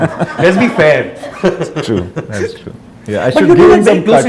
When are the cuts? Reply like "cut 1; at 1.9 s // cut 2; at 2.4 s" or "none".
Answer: none